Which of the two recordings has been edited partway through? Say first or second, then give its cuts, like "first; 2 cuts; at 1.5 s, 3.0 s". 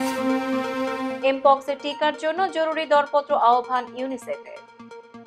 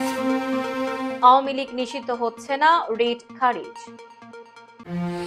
first; 1 cut; at 1.1 s